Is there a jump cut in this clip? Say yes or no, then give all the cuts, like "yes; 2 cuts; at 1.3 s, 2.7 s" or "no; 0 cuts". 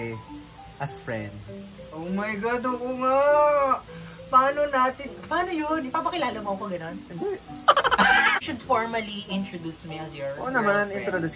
yes; 1 cut; at 8.4 s